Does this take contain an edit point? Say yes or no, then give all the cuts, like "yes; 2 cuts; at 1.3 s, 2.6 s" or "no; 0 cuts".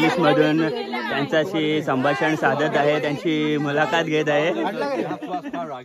no; 0 cuts